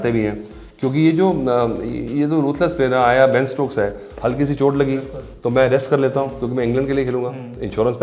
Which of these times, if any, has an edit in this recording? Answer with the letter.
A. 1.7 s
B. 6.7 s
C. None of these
C